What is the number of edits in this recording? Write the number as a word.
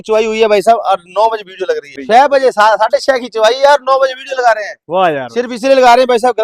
one